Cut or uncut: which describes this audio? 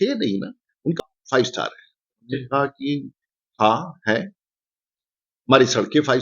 cut